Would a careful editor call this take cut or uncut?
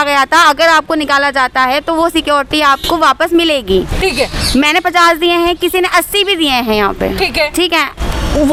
uncut